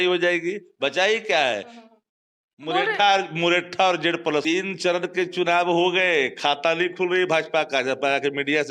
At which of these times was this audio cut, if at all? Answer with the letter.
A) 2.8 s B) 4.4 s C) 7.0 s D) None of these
B